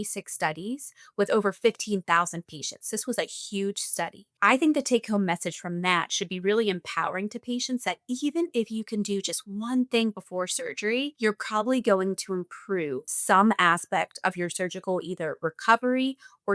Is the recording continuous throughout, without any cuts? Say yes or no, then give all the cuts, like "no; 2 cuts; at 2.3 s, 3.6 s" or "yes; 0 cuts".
no; 3 cuts; at 4.2 s, 11.1 s, 13.1 s